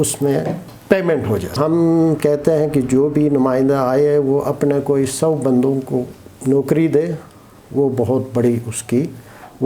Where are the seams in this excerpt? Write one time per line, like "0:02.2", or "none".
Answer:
0:01.6